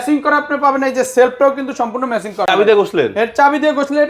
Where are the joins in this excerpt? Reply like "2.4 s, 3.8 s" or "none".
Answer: 2.5 s